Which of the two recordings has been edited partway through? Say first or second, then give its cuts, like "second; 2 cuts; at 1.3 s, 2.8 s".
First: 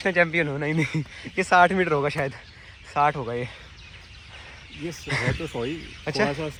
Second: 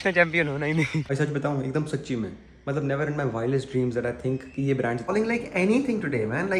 second; 2 cuts; at 1.1 s, 5.1 s